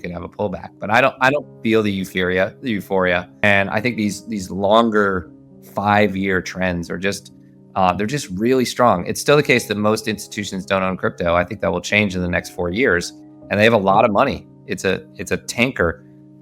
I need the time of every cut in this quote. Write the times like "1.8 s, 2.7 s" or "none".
3.4 s